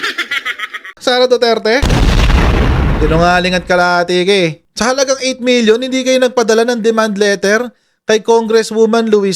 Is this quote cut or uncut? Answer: cut